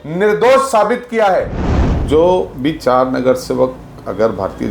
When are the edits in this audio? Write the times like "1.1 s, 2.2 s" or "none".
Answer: 1.6 s